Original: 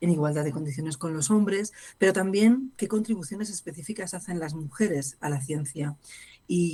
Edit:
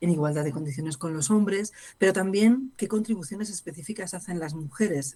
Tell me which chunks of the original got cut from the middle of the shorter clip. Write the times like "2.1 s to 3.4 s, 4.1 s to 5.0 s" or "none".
none